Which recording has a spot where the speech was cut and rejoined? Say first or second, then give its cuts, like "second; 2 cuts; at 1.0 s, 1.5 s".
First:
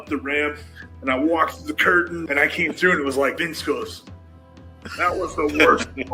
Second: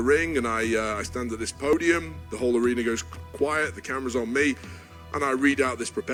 first; 2 cuts; at 2.2 s, 3.4 s